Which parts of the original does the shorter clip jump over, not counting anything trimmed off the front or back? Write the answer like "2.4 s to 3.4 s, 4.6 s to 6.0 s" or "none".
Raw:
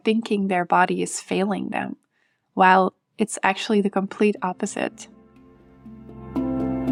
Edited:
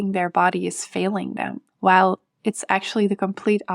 2.0 s to 2.4 s